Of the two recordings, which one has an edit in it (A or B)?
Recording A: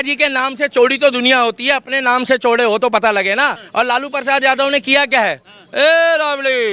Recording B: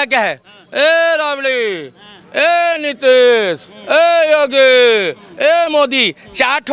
A